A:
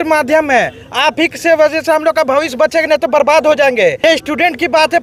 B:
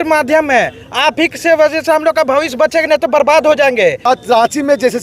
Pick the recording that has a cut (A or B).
B